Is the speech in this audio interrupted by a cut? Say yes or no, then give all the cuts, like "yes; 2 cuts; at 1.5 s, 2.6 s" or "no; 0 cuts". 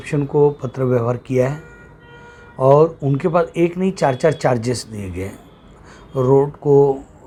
no; 0 cuts